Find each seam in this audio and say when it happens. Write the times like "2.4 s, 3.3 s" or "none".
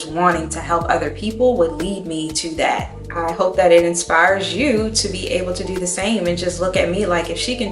3.0 s